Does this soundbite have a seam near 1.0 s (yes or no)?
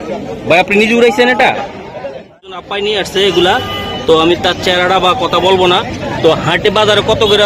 no